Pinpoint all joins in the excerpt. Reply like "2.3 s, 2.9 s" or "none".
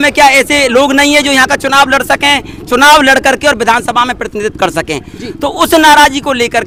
none